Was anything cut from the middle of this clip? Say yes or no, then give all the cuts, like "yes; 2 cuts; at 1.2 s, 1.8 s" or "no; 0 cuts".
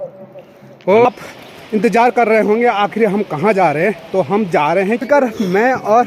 yes; 2 cuts; at 1.1 s, 5.0 s